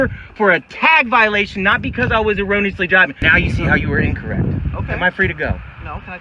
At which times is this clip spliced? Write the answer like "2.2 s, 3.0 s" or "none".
3.2 s